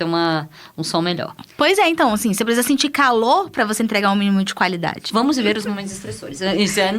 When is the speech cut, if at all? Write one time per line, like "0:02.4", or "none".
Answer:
0:05.0